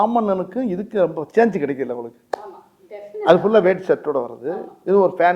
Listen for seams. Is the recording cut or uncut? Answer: uncut